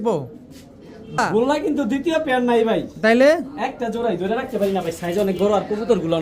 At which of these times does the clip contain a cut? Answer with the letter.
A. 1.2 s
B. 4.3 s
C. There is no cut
A